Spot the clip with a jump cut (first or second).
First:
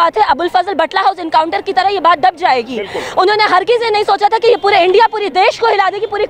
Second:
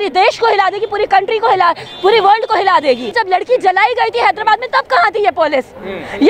second